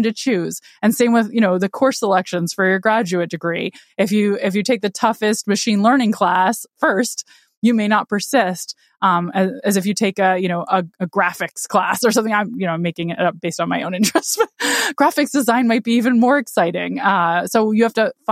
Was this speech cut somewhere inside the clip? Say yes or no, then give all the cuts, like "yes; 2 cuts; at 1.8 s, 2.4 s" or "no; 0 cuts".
no; 0 cuts